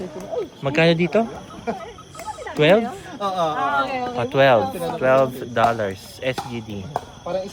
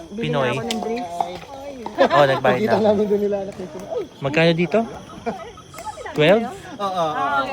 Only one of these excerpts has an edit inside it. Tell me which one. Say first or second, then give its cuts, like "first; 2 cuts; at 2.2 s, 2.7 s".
second; 1 cut; at 1.9 s